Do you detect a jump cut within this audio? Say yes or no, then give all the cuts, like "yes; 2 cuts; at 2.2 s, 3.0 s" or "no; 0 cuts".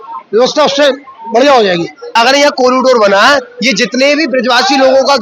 yes; 1 cut; at 2.1 s